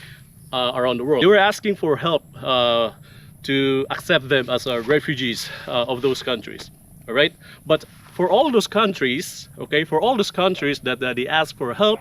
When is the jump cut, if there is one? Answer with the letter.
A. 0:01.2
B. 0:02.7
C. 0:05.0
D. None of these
A